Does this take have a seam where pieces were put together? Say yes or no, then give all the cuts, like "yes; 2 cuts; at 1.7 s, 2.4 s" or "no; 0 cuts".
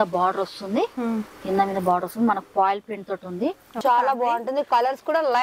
yes; 1 cut; at 3.8 s